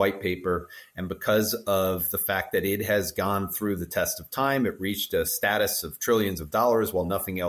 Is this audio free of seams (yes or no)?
yes